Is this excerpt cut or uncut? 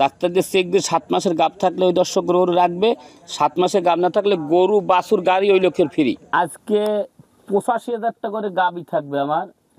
cut